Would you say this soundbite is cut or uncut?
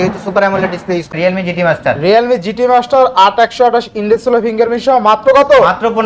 cut